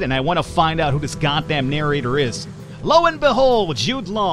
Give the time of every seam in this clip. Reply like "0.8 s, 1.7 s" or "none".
none